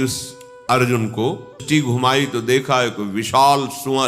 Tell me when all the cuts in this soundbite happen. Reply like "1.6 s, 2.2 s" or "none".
1.6 s

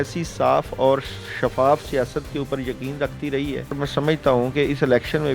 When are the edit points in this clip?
3.8 s

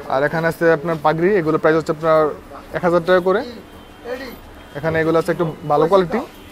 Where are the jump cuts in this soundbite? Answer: none

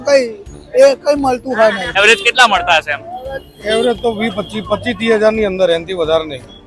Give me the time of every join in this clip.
1.9 s

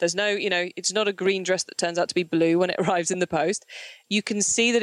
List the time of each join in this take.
3.9 s

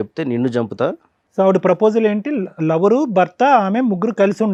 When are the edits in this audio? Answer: none

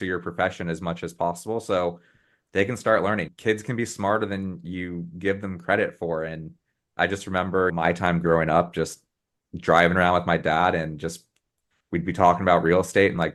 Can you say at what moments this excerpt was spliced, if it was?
none

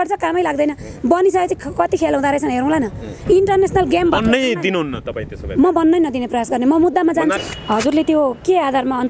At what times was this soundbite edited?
7.4 s

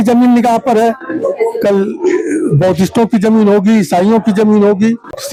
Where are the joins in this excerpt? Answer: none

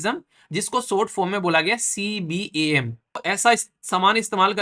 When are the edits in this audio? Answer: 3.3 s

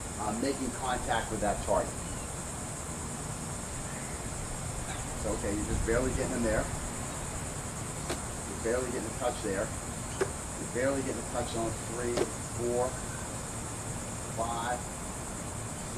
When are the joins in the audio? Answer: none

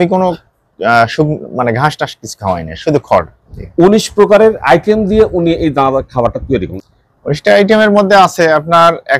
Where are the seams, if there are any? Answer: 3.5 s, 6.8 s

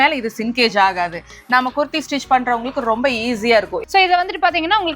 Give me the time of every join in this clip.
3.8 s

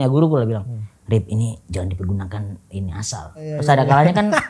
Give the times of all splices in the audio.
3.5 s

